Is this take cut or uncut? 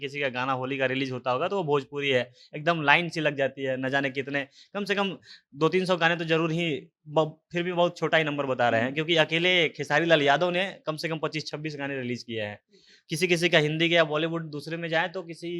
uncut